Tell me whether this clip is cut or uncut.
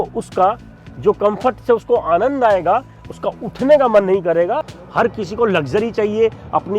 cut